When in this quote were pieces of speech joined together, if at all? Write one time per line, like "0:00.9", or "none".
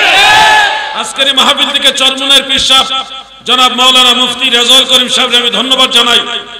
0:01.0